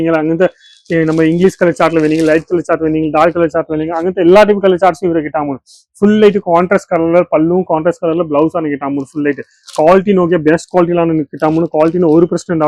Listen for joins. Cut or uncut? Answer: uncut